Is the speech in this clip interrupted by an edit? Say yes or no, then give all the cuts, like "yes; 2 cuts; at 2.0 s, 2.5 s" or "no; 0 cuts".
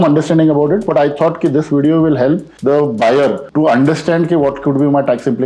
yes; 2 cuts; at 2.5 s, 3.4 s